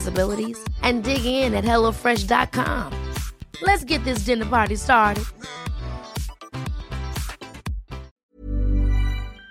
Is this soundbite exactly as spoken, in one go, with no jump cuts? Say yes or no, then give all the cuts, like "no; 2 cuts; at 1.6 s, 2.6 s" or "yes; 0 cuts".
no; 1 cut; at 8.1 s